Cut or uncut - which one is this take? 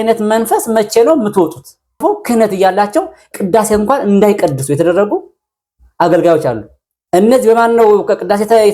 cut